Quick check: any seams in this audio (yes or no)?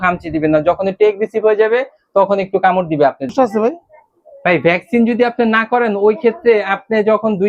yes